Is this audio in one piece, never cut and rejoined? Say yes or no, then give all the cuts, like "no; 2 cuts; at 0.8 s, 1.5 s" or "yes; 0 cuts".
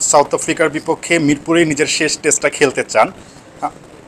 yes; 0 cuts